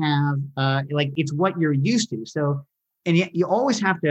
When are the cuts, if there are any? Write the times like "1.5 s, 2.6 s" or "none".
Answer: 1.1 s